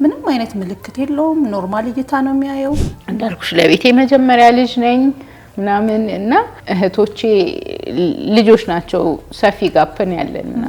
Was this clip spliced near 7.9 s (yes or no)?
no